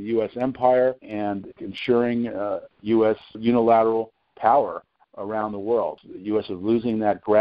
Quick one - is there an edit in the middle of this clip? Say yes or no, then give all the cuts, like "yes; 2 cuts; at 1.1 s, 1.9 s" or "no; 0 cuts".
yes; 3 cuts; at 1.5 s, 3.4 s, 6.1 s